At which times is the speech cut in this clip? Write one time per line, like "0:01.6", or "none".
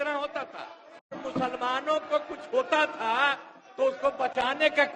0:01.2